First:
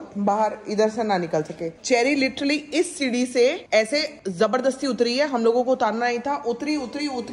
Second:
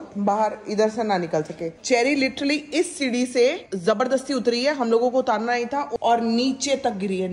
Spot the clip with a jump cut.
second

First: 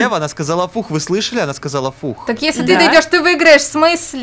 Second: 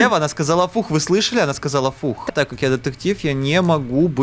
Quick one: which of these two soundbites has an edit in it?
second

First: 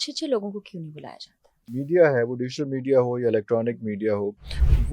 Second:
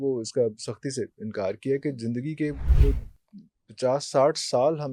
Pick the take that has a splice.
first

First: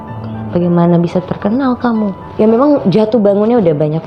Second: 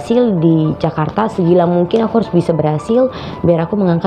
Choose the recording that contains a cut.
first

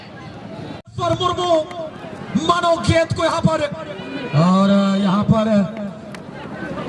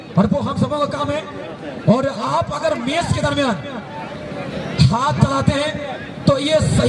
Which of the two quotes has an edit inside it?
first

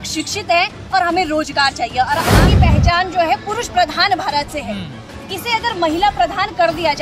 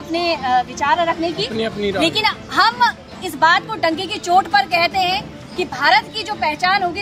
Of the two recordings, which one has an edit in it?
first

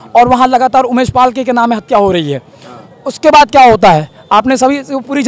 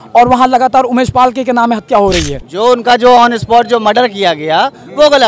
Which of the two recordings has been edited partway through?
second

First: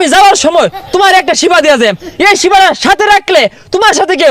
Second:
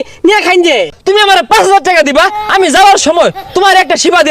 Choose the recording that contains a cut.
second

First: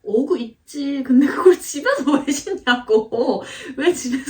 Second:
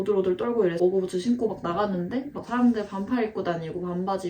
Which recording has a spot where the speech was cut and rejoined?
second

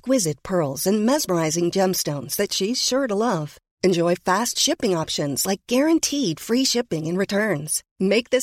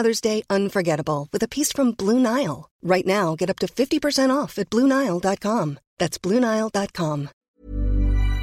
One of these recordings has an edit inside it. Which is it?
second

